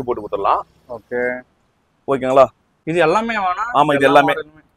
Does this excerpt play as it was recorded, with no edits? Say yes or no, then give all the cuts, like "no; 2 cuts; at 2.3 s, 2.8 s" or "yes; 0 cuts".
yes; 0 cuts